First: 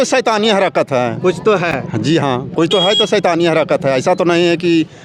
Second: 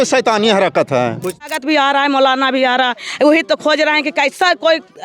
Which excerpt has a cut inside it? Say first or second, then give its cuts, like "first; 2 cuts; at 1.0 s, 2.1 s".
second; 1 cut; at 1.4 s